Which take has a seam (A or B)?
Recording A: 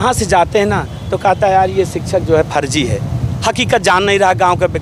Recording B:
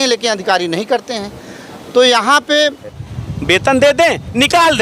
B